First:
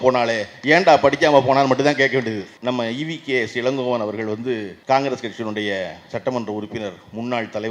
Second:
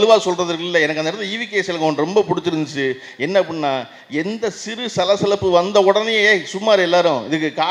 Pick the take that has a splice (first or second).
first